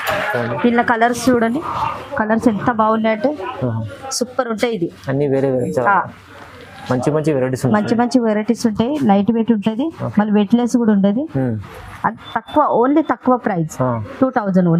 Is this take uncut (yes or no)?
yes